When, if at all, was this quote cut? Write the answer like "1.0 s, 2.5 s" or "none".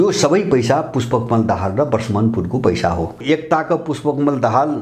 3.2 s